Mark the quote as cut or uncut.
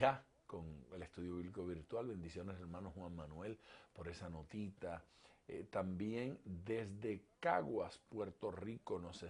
cut